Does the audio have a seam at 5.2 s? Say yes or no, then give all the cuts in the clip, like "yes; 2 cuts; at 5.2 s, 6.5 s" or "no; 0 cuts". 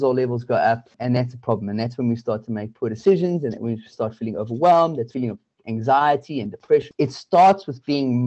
yes; 3 cuts; at 0.9 s, 5.2 s, 6.9 s